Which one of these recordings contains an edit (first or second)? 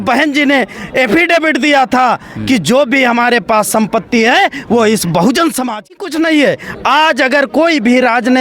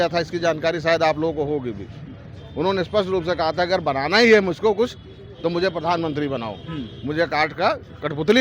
first